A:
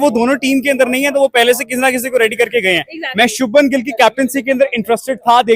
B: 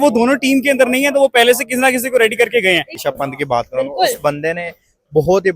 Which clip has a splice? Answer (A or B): B